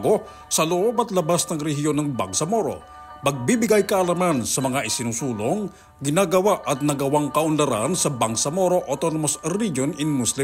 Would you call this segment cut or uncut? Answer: uncut